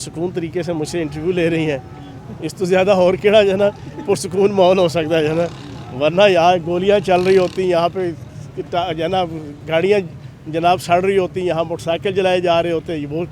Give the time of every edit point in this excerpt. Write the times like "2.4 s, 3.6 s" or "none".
none

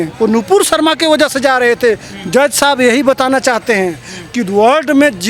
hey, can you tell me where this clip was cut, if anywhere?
none

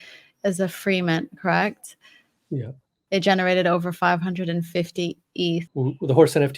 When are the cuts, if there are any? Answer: 5.7 s

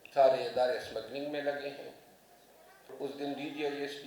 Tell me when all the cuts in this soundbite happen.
2.9 s

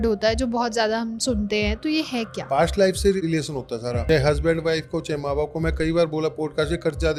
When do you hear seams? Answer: none

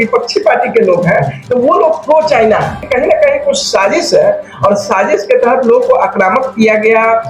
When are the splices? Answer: 1.4 s, 2.8 s

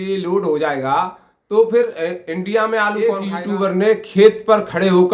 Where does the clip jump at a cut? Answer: 3.3 s

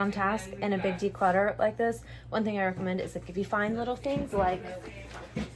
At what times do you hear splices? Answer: none

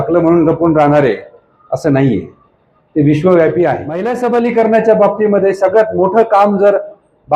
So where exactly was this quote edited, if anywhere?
4.1 s

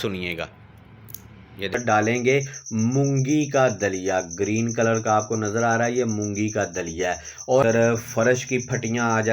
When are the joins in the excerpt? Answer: 1.7 s, 7.6 s

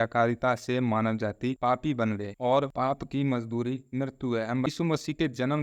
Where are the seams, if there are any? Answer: 4.7 s

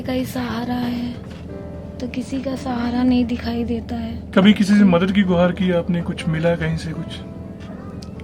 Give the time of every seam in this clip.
none

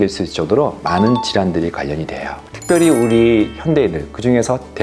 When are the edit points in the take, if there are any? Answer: 2.5 s

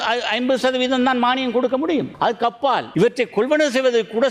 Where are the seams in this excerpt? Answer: 2.4 s

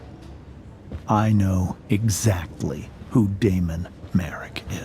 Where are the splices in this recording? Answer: 1.0 s

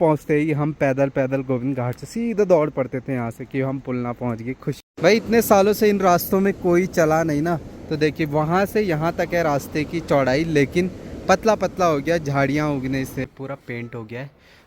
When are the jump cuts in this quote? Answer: 4.8 s, 13.2 s

